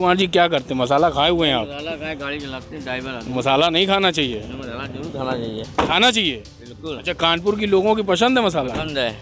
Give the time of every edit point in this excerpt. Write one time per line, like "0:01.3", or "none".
none